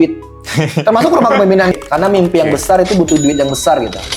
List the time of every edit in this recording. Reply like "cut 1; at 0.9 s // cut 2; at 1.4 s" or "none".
cut 1; at 1.7 s